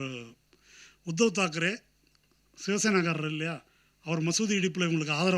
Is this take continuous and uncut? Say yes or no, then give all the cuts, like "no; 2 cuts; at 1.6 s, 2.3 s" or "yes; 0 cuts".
yes; 0 cuts